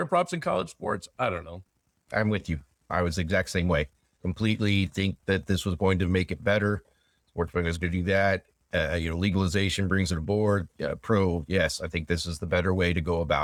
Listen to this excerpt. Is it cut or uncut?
uncut